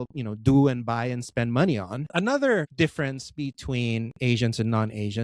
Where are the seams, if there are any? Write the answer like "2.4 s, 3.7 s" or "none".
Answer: 2.0 s, 2.7 s